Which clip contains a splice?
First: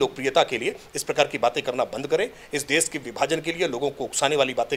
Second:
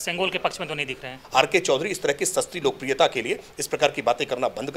second; 1 cut; at 1.1 s

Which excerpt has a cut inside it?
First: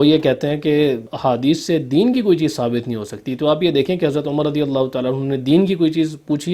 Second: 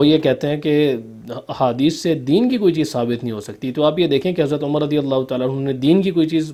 first; 1 cut; at 1.1 s

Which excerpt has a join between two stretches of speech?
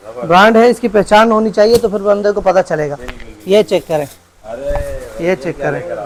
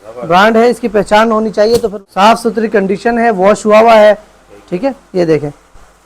second; 1 cut; at 1.9 s

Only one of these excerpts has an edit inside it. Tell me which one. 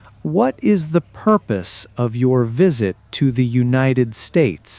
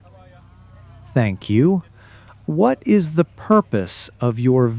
second; 1 cut; at 1.1 s

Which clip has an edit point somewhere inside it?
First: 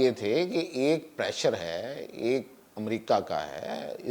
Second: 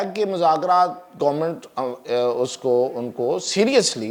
first; 1 cut; at 2.6 s

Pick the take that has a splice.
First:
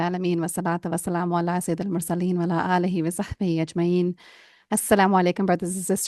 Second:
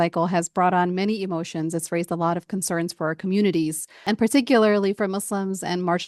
second; 1 cut; at 4.0 s

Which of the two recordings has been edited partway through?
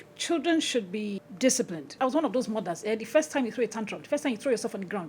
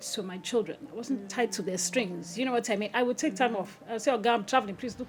first; 1 cut; at 2.0 s

